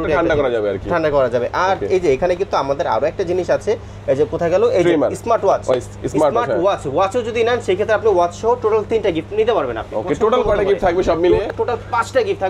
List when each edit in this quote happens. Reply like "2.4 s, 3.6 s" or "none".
11.5 s